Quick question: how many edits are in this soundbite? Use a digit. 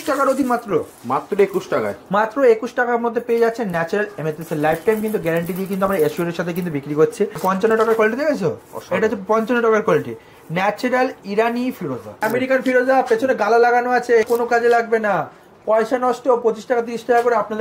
3